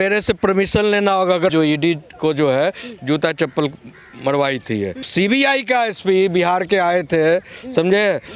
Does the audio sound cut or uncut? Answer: cut